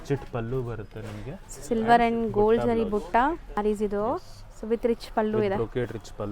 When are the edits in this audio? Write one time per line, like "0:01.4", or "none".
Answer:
0:03.6